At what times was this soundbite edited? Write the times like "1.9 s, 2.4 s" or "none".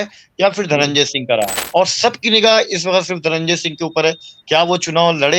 1.6 s